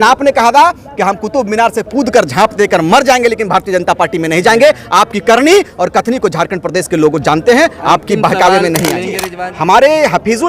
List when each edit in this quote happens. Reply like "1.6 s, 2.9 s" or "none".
9.2 s